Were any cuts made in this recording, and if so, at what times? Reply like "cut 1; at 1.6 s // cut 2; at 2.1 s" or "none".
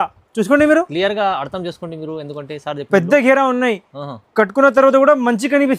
none